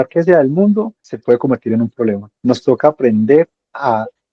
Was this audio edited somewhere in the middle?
yes; 2 cuts; at 1.0 s, 2.3 s

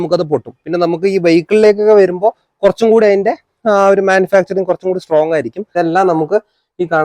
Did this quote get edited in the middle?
yes; 1 cut; at 5.7 s

